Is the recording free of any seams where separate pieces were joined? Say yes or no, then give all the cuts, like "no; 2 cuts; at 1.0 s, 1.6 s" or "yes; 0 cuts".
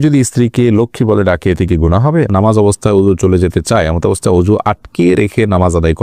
no; 1 cut; at 2.3 s